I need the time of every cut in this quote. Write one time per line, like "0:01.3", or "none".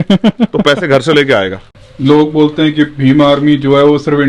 0:01.6

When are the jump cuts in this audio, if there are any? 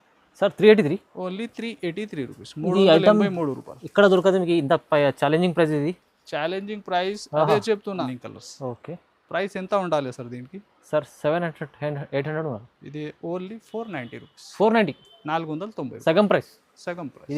0:08.1

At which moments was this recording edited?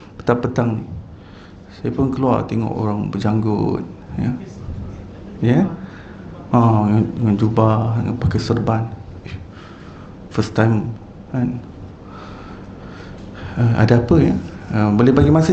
none

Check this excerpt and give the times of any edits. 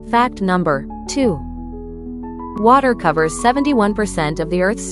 0:01.0

